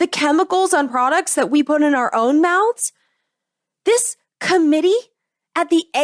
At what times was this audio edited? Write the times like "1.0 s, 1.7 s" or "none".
none